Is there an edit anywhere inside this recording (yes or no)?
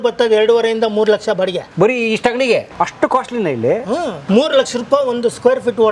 yes